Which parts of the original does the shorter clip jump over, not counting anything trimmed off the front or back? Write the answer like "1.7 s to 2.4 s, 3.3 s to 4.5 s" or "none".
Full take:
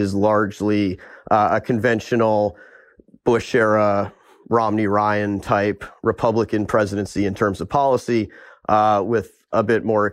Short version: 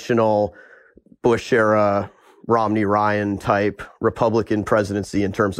none